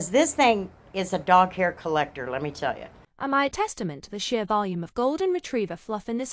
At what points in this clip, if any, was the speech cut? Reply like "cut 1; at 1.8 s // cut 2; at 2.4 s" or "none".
cut 1; at 2.9 s